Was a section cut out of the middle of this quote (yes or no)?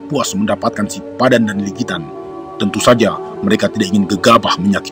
no